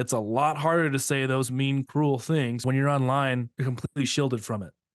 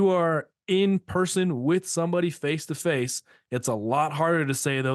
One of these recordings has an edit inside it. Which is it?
first; 2 cuts; at 2.6 s, 3.5 s

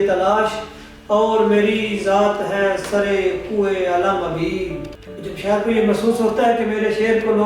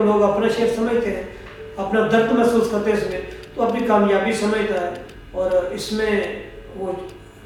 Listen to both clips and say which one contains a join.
first; 1 cut; at 5.6 s

